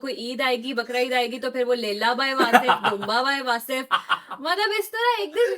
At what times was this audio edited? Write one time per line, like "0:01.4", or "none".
none